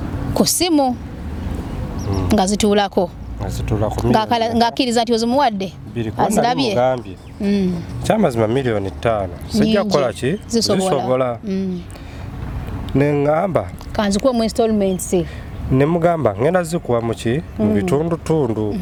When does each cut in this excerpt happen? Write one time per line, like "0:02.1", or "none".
none